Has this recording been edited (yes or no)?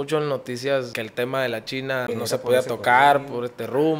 yes